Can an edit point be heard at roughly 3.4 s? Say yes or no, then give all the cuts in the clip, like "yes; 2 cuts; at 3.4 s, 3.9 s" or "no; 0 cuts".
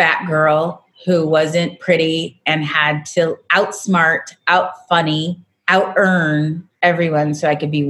no; 2 cuts; at 5.5 s, 6.6 s